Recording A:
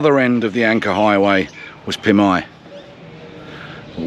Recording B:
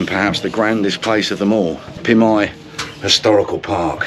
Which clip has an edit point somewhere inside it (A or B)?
B